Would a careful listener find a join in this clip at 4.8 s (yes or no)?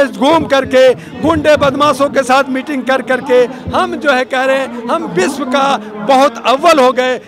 no